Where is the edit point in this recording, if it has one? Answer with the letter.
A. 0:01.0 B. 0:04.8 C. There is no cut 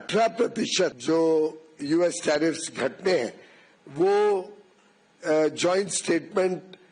A